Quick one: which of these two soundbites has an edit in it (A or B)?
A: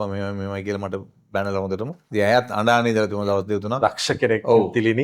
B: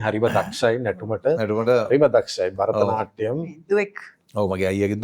A